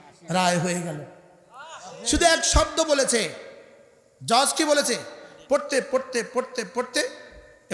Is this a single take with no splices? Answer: yes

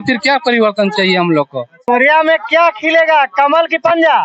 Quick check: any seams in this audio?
yes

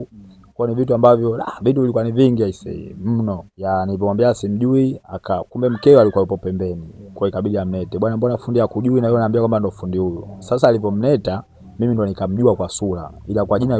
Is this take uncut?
no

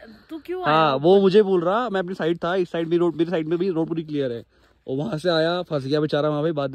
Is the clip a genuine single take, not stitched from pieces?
yes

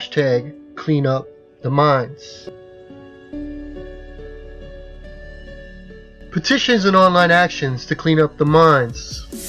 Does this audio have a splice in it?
yes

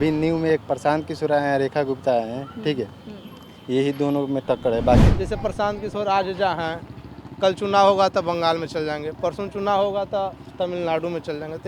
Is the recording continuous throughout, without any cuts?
no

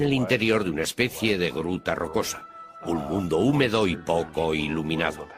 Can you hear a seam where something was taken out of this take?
no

